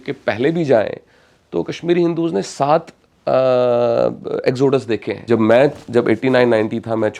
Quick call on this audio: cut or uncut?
cut